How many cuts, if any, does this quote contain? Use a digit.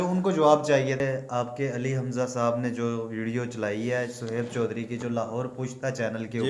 1